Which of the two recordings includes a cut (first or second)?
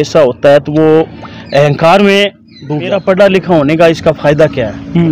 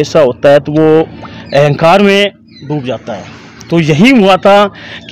first